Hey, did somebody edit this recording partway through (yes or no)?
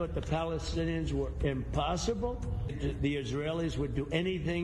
yes